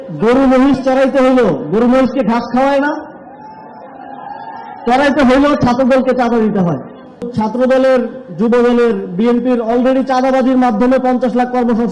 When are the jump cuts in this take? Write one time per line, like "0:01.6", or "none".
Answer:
0:07.3